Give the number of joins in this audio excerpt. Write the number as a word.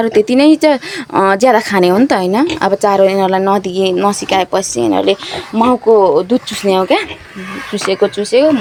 zero